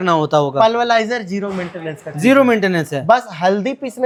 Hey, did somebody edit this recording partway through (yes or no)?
no